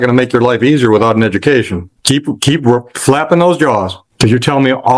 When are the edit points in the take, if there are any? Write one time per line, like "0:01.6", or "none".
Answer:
0:01.9